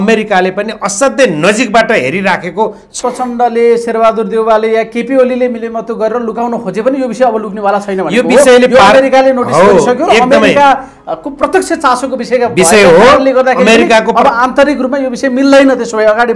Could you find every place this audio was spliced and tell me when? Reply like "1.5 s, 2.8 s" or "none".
2.9 s

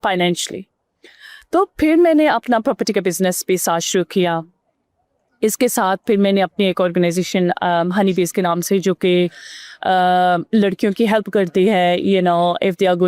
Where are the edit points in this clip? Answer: none

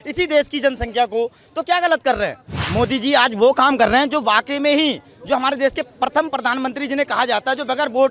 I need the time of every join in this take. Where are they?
2.5 s

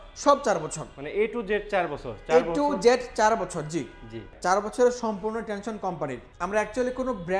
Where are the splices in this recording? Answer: 4.1 s, 6.3 s

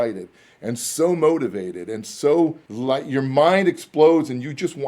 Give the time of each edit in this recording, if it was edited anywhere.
2.7 s

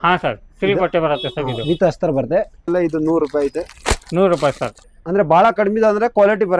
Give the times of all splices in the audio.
2.7 s, 4.9 s

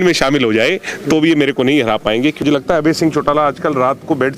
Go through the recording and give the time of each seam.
2.4 s

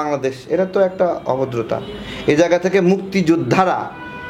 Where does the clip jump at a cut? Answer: none

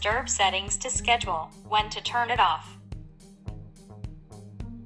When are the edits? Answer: 3.3 s

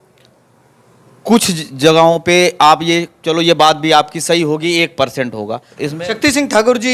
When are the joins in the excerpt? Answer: 5.7 s

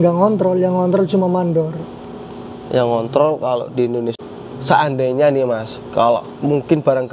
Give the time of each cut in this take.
4.1 s

